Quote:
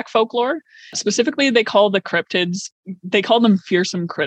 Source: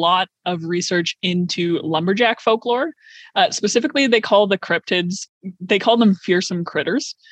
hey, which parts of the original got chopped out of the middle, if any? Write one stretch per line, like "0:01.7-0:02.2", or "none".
0:03.3-0:03.5